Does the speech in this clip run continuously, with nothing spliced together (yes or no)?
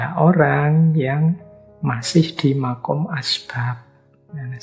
yes